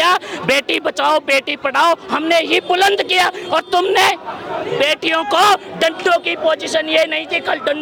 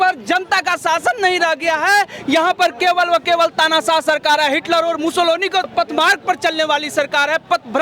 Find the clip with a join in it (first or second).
second